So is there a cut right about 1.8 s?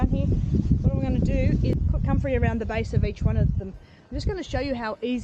yes; 1 cut; at 1.8 s

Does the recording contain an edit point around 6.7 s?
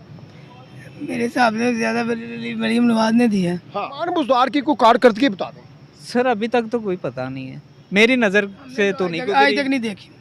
no; 1 cut; at 4.0 s

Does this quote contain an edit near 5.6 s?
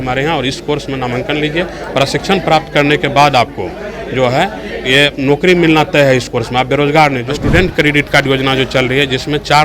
no; 1 cut; at 7.3 s

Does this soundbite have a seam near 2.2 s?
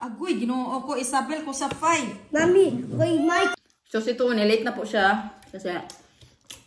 no; 1 cut; at 3.5 s

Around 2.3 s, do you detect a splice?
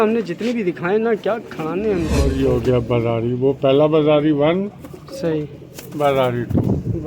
yes; 1 cut; at 2.3 s

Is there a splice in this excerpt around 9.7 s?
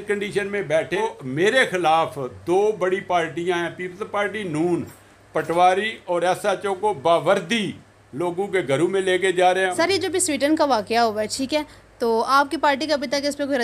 yes; 2 cuts; at 1.0 s, 9.7 s

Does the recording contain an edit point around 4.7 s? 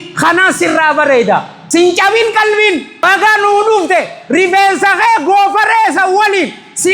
no; 2 cuts; at 1.5 s, 3.1 s

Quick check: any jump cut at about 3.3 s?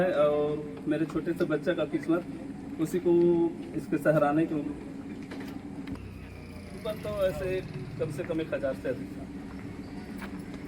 no; 1 cut; at 6.0 s

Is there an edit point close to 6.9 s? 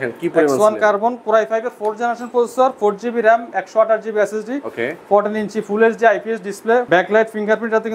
yes; 1 cut; at 6.9 s

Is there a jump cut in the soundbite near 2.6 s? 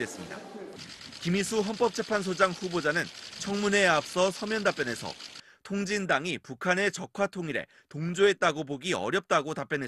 yes; 1 cut; at 2.6 s

